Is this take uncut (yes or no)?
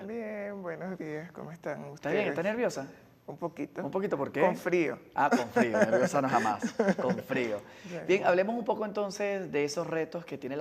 no